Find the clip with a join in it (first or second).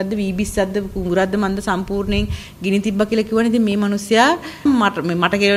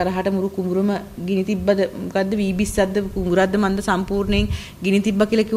first